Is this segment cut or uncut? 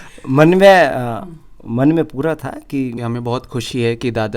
cut